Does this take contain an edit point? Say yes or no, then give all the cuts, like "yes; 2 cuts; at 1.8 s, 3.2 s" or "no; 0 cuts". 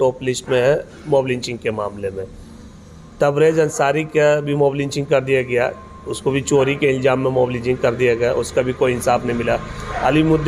no; 0 cuts